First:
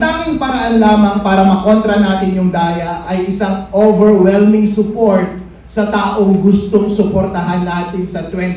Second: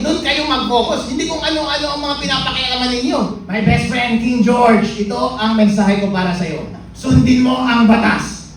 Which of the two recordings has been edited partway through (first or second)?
second